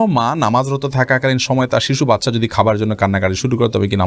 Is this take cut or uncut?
uncut